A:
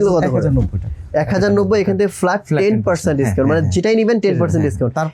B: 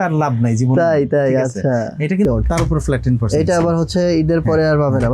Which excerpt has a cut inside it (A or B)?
B